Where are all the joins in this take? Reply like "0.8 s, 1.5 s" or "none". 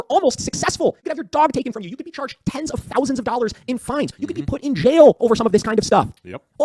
1.0 s